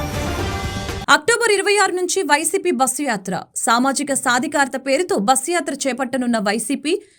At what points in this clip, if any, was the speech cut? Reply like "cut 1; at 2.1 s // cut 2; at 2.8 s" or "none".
cut 1; at 0.9 s